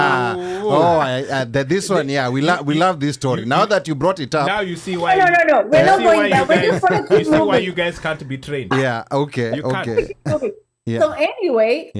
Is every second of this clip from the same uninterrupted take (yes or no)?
yes